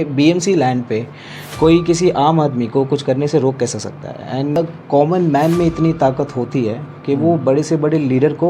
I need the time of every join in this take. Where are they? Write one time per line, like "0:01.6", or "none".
0:04.6